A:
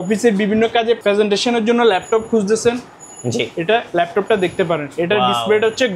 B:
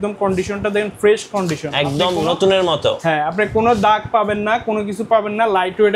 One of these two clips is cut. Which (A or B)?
A